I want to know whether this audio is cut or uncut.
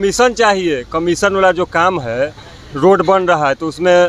uncut